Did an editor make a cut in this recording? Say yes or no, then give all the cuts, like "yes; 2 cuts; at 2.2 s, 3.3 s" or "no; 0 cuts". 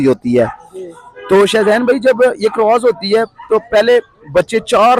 no; 0 cuts